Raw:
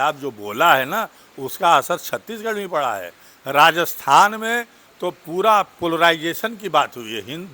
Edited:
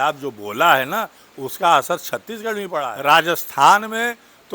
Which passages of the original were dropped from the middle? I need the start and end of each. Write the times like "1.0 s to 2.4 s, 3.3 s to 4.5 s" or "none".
2.9 s to 3.4 s